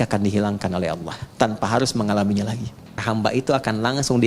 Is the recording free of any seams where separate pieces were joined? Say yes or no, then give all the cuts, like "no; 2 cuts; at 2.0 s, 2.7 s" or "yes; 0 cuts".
no; 1 cut; at 3.0 s